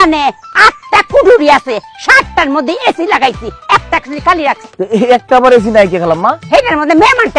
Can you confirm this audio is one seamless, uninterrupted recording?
yes; 0 cuts

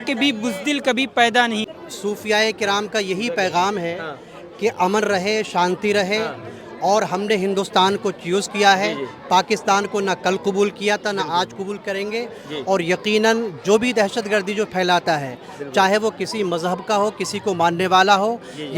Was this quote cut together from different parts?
yes; 1 cut; at 1.7 s

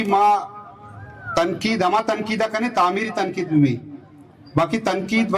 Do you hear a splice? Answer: no; 0 cuts

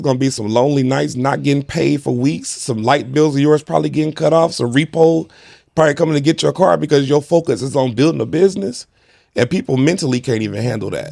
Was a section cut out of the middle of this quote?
no; 0 cuts

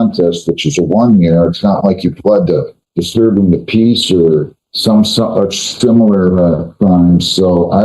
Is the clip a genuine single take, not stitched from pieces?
no; 2 cuts; at 2.8 s, 4.6 s

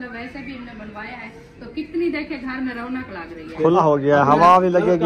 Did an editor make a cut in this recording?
yes; 1 cut; at 3.8 s

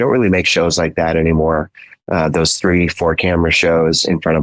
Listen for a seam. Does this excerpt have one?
no; 0 cuts

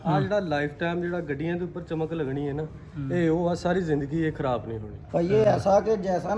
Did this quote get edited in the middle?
no; 0 cuts

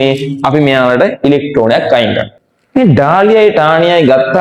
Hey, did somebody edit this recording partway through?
yes; 1 cut; at 2.3 s

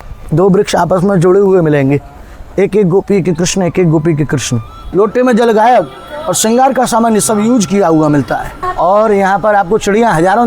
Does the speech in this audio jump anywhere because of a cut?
yes; 2 cuts; at 4.8 s, 8.6 s

